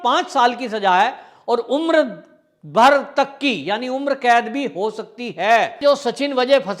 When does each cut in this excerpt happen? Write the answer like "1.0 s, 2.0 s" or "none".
5.8 s